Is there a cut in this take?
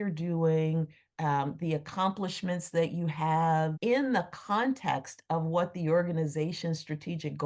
yes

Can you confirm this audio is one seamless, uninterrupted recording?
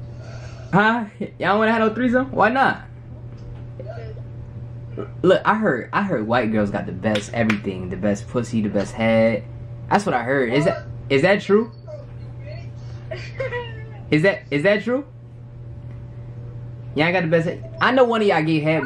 yes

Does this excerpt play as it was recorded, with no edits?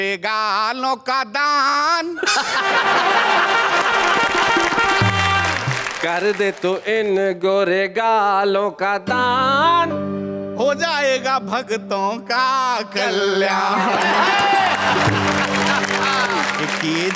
yes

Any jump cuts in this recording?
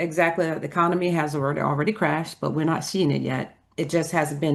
no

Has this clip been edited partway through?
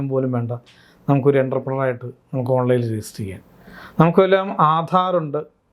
no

